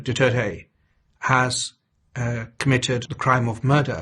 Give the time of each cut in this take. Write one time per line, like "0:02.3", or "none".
0:03.1